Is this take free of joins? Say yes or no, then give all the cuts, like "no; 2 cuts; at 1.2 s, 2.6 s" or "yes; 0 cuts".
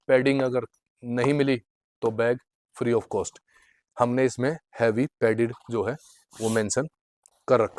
yes; 0 cuts